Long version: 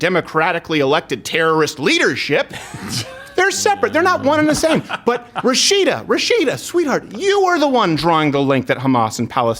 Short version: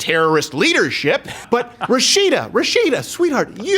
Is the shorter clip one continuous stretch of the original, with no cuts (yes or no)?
no